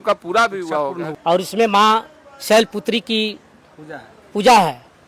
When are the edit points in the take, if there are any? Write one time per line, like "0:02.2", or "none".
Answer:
0:01.1